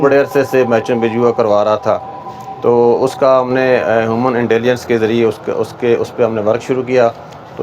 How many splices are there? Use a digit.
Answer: 0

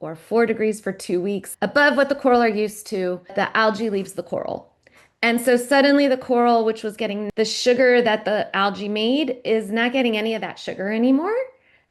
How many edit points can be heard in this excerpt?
3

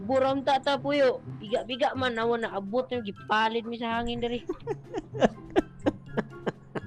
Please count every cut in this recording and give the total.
1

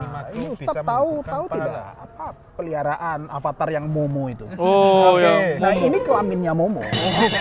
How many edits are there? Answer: 0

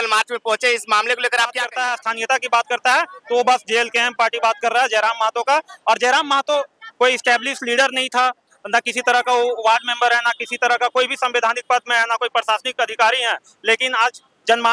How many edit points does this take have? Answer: 1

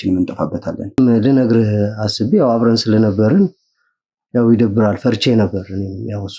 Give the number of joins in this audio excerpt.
1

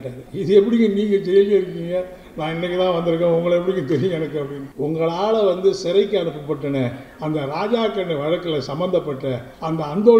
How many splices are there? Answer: 1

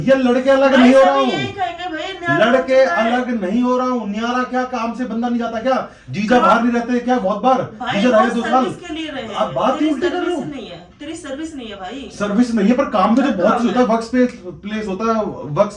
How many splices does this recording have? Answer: 0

